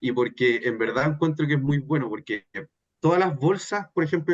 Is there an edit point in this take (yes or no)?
no